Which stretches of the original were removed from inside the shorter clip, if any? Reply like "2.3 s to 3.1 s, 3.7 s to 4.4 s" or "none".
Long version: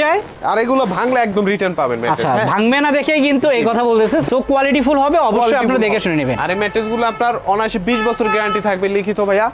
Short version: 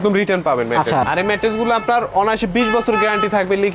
2.4 s to 6.4 s